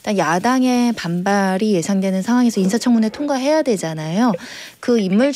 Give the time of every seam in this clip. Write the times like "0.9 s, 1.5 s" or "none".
none